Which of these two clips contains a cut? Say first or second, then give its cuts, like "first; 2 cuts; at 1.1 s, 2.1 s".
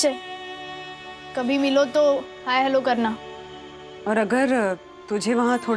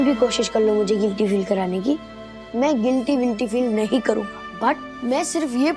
second; 1 cut; at 4.4 s